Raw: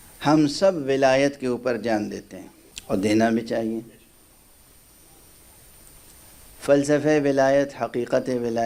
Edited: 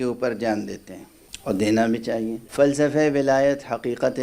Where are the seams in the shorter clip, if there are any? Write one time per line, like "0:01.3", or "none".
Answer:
0:02.4